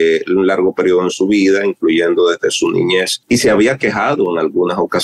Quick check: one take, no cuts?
no; 1 cut; at 3.1 s

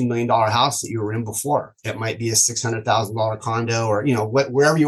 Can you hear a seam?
no; 0 cuts

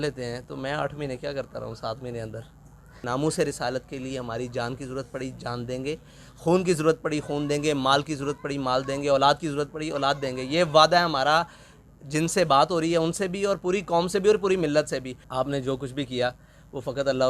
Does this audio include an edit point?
yes; 2 cuts; at 2.9 s, 15.2 s

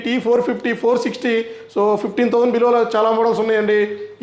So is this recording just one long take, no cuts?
yes; 0 cuts

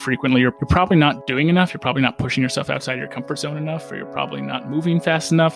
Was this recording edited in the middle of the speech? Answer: yes; 1 cut; at 1.2 s

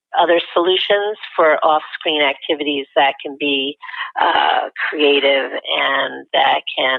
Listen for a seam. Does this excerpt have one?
no; 0 cuts

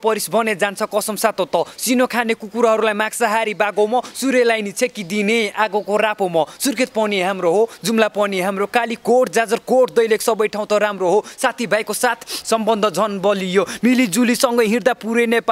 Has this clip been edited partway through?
no; 0 cuts

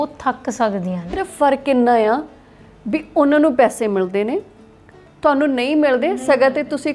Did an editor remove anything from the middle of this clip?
yes; 1 cut; at 1.2 s

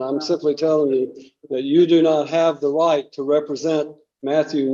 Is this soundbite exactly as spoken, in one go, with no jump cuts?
yes; 0 cuts

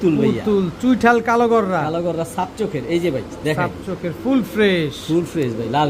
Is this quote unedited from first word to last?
yes; 0 cuts

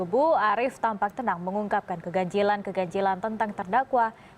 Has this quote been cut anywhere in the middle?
yes; 1 cut; at 3.3 s

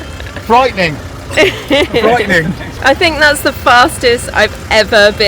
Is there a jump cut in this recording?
yes; 1 cut; at 2.6 s

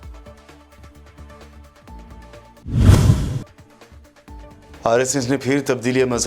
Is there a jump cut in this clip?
yes; 1 cut; at 2.3 s

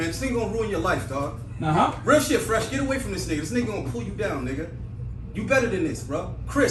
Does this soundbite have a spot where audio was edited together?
no; 0 cuts

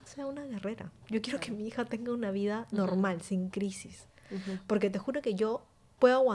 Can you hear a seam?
no; 0 cuts

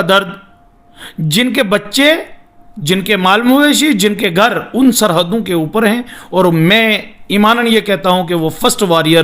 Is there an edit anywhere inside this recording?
no; 0 cuts

